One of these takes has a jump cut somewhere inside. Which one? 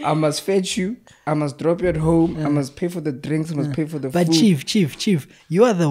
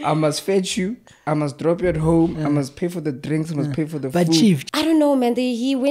second; 1 cut; at 4.7 s

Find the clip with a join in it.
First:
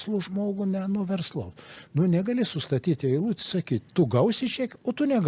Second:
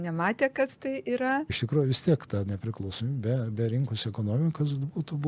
second; 1 cut; at 1.6 s

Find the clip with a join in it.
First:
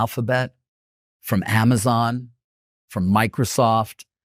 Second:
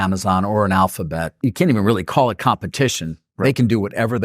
second; 1 cut; at 1.3 s

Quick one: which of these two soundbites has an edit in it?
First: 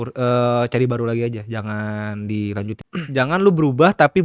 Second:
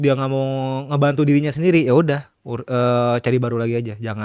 first; 1 cut; at 2.8 s

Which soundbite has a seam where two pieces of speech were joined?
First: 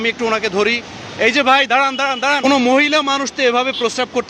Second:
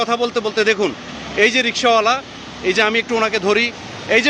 first; 1 cut; at 2.5 s

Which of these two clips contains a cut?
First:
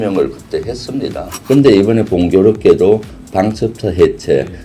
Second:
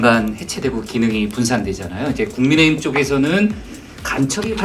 first; 1 cut; at 1.3 s

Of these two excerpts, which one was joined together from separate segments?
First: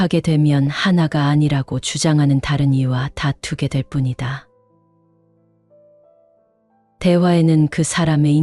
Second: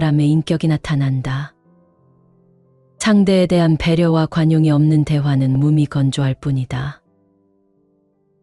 first; 2 cuts; at 4.5 s, 6.9 s

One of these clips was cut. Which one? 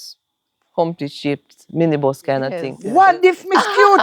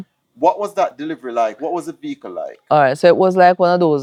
first; 1 cut; at 2.7 s

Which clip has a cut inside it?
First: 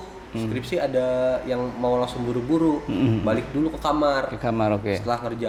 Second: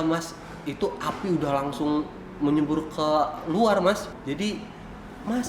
second; 1 cut; at 4.1 s

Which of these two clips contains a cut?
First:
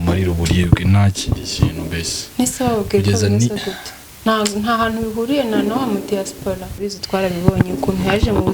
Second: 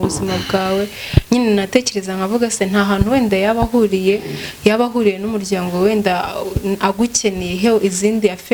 first; 1 cut; at 6.8 s

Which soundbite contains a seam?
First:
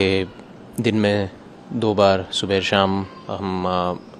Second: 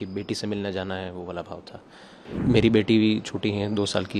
second; 1 cut; at 2.3 s

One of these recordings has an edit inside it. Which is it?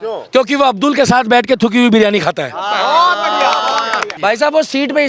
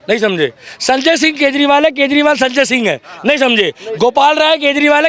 first; 1 cut; at 4.1 s

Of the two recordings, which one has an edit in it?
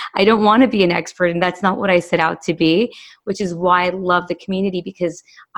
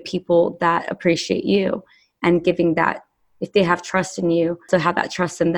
second; 1 cut; at 4.7 s

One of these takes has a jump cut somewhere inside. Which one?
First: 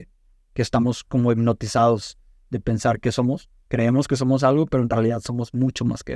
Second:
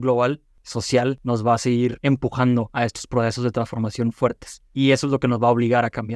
second; 4 cuts; at 0.9 s, 2.0 s, 2.7 s, 4.7 s

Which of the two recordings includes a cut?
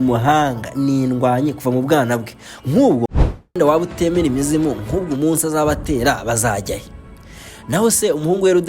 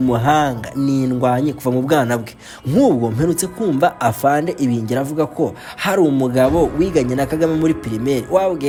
first; 1 cut; at 3.6 s

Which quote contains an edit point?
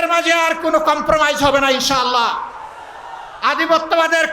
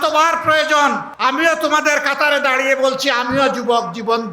second; 1 cut; at 1.1 s

